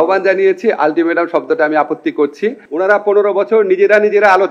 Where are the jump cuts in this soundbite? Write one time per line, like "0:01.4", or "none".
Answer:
0:02.6